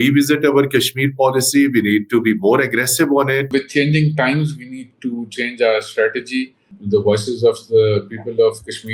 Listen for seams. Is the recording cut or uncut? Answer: cut